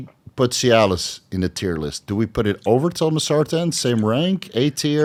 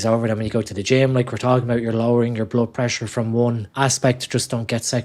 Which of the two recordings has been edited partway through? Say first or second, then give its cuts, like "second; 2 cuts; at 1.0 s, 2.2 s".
second; 1 cut; at 3.7 s